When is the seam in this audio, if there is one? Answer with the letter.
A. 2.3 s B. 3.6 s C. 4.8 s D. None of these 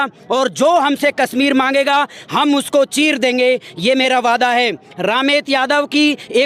D